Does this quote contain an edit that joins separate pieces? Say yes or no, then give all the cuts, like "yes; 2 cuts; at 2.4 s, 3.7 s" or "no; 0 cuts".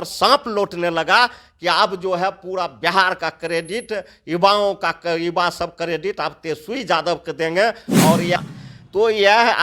yes; 1 cut; at 8.4 s